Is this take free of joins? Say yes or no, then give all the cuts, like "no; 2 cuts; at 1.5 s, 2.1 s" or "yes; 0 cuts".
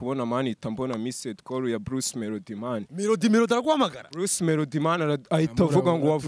yes; 0 cuts